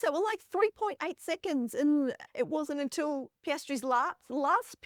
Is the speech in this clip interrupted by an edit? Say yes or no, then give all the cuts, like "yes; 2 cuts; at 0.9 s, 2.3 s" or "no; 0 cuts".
no; 0 cuts